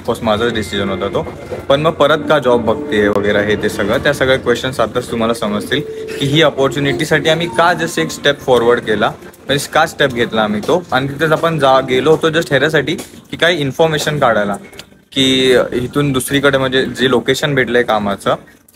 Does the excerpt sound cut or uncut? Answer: uncut